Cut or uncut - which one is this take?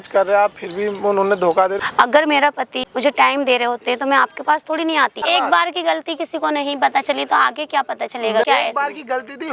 cut